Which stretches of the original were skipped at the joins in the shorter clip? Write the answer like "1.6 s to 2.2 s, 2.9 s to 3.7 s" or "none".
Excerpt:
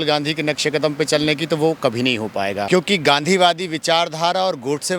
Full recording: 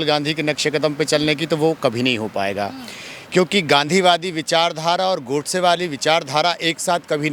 2.6 s to 3.3 s